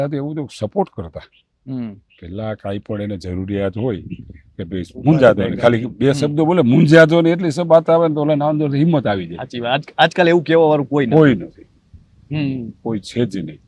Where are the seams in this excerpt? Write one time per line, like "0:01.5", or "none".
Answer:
none